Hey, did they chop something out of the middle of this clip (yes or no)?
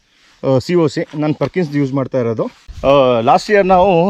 yes